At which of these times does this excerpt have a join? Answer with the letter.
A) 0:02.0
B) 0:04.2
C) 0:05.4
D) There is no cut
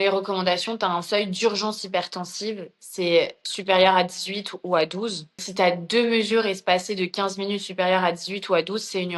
C